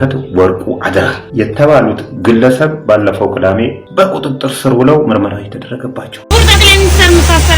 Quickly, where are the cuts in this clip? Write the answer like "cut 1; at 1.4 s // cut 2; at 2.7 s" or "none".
cut 1; at 1.2 s // cut 2; at 3.8 s // cut 3; at 6.1 s